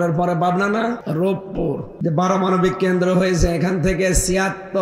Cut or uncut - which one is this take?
cut